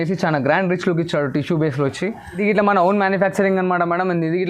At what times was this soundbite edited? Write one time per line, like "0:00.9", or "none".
0:02.4